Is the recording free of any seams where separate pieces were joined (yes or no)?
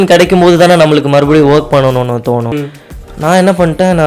no